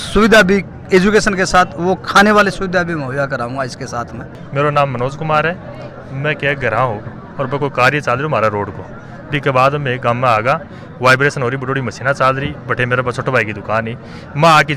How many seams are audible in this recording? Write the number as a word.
zero